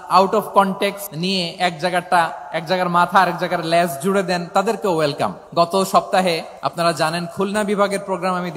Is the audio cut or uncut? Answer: cut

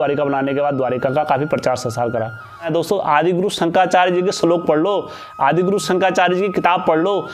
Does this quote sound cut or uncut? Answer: cut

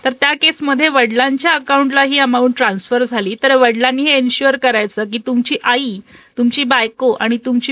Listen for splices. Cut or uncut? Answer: uncut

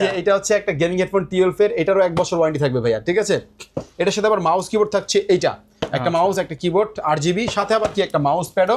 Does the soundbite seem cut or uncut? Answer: uncut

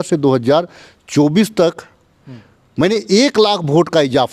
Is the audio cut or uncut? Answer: uncut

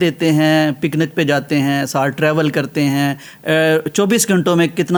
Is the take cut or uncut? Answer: uncut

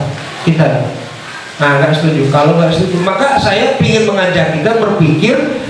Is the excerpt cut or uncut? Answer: uncut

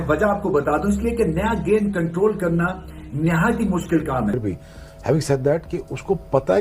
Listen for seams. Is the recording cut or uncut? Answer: cut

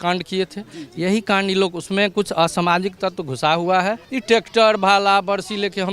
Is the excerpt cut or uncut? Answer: cut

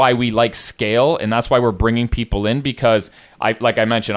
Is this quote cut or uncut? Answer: uncut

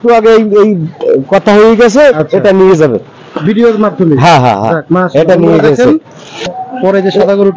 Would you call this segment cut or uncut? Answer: cut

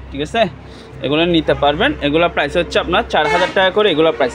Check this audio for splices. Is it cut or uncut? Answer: uncut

